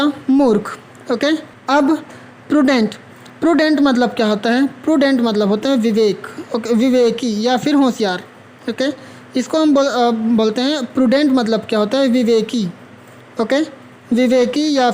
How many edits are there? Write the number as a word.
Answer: one